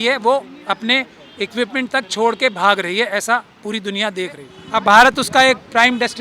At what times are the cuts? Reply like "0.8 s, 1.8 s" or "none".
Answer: 4.5 s